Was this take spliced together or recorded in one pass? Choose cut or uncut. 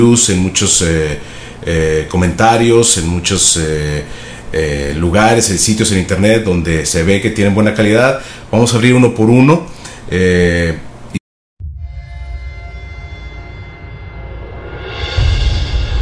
uncut